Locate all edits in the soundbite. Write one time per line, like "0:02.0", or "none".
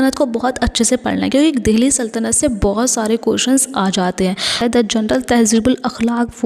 0:04.6